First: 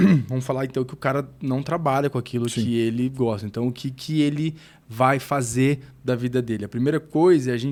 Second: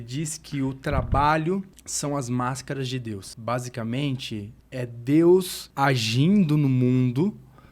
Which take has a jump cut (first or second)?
second